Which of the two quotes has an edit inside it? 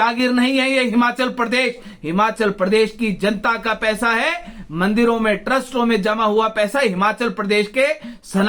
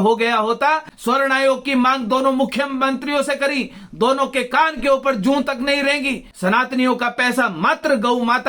second; 2 cuts; at 0.9 s, 6.3 s

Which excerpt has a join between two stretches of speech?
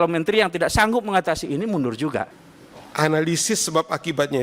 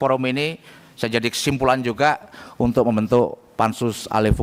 first; 1 cut; at 2.4 s

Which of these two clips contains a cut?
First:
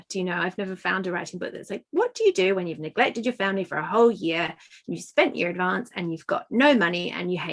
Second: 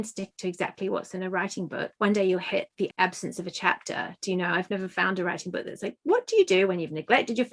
second; 2 cuts; at 1.9 s, 2.9 s

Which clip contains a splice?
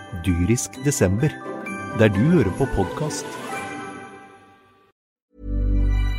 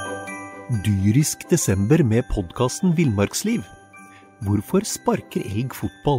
first; 1 cut; at 5.0 s

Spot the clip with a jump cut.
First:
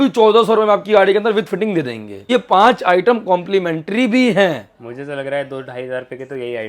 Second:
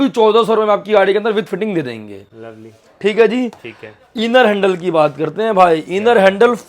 first; 1 cut; at 2.1 s

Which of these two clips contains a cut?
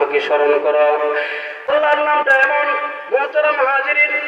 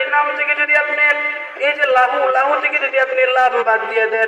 first; 1 cut; at 1.7 s

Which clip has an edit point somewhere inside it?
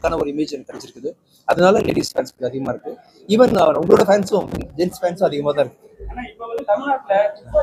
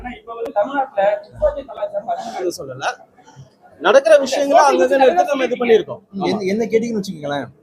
second; 1 cut; at 2.4 s

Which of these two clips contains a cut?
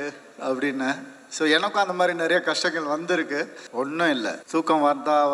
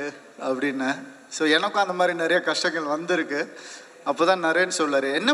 first; 2 cuts; at 3.6 s, 4.4 s

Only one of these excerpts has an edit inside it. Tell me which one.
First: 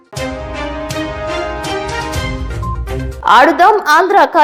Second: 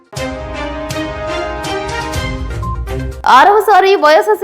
second; 1 cut; at 3.1 s

